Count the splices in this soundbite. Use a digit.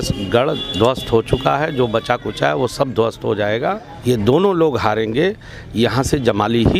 1